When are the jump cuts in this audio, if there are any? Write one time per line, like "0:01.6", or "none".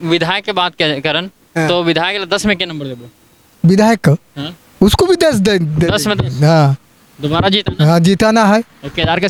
none